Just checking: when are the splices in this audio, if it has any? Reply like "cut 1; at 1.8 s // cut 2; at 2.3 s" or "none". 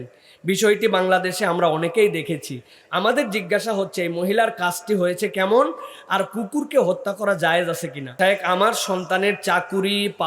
cut 1; at 8.1 s